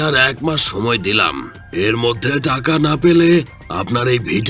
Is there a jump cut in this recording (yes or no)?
no